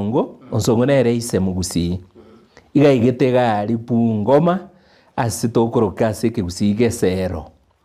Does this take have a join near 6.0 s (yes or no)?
yes